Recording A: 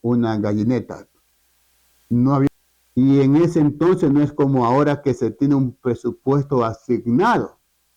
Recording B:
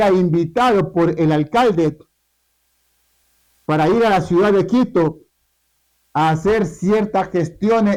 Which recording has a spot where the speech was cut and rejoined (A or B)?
A